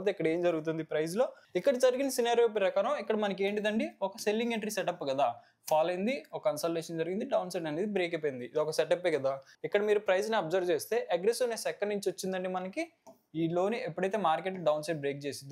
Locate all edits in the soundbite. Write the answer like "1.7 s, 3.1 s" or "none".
1.4 s, 9.5 s